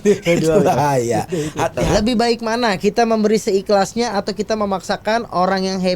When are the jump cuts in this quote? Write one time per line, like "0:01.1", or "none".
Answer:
0:01.8